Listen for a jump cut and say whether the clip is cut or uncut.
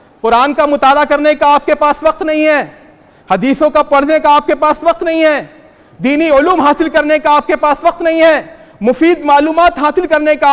uncut